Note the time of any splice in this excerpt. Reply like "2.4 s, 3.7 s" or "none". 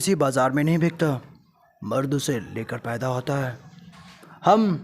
none